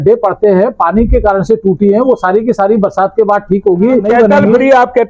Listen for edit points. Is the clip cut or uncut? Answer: cut